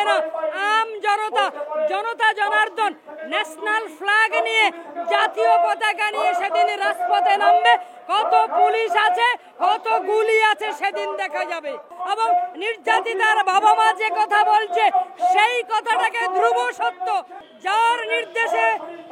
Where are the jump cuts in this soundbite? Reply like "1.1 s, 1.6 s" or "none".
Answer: 11.9 s, 17.4 s